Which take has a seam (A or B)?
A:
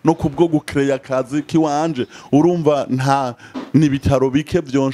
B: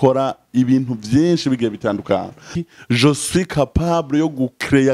B